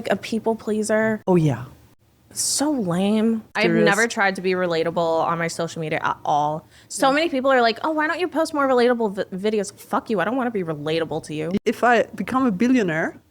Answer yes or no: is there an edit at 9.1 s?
no